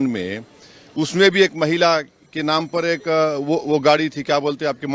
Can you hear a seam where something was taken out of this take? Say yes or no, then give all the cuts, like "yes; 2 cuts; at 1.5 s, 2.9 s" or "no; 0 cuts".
no; 0 cuts